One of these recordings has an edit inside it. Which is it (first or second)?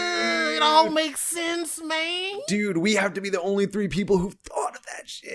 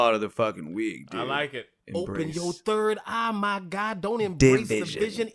second